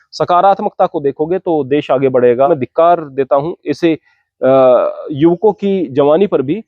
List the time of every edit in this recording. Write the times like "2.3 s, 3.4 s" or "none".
2.5 s